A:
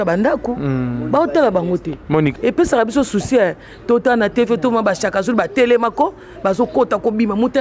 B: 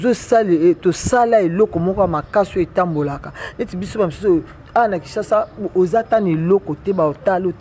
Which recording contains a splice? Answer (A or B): A